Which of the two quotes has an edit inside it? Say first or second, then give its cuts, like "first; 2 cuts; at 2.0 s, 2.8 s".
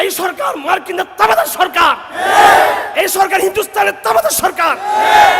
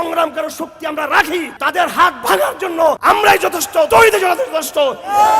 second; 3 cuts; at 1.5 s, 3.0 s, 3.9 s